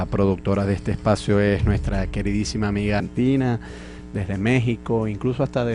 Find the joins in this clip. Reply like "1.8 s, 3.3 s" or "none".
none